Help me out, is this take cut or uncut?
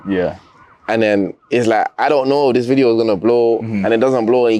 uncut